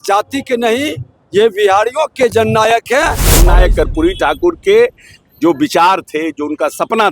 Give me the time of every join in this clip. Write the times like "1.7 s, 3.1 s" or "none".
3.4 s